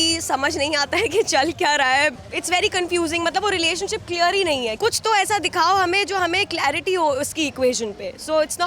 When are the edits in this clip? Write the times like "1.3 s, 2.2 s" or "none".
2.2 s, 4.7 s